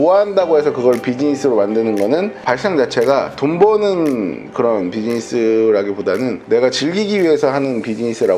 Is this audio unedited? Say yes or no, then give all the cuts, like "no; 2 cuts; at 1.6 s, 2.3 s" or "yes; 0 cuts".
yes; 0 cuts